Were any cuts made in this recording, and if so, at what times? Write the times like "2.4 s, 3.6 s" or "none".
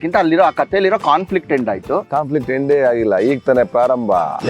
2.1 s